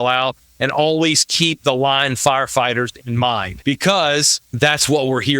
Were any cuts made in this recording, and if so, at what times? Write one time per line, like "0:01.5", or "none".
0:03.5
0:04.4